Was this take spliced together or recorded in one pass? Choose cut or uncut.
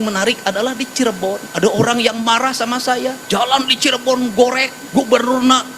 cut